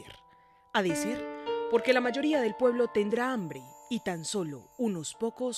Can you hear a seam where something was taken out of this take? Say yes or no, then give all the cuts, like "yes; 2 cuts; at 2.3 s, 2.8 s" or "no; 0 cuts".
no; 0 cuts